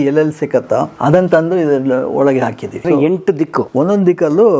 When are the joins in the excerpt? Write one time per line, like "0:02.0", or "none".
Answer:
0:00.9
0:03.2